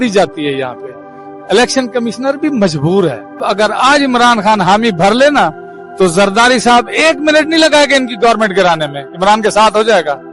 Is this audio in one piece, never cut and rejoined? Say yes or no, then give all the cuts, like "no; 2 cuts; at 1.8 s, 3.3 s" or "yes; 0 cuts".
no; 1 cut; at 3.4 s